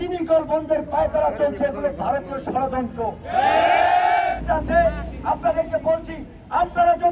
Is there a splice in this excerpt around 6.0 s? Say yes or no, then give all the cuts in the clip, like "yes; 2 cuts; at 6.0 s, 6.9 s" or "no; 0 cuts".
no; 1 cut; at 4.3 s